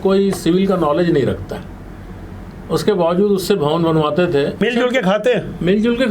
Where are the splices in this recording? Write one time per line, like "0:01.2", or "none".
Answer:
0:04.6